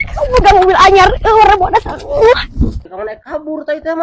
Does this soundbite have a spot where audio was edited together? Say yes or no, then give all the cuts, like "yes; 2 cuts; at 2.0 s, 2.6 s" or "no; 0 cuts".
yes; 1 cut; at 2.8 s